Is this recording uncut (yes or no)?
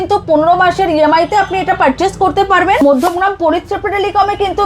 no